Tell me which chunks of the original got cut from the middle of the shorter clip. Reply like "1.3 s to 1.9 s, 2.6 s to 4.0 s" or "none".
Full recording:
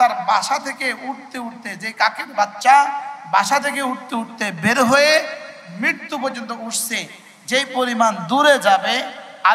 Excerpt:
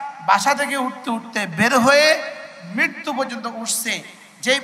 none